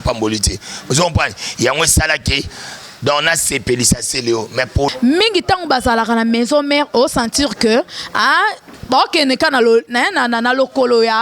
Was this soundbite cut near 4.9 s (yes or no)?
yes